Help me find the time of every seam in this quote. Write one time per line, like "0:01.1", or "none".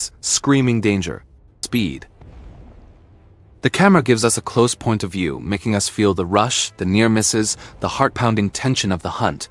0:01.6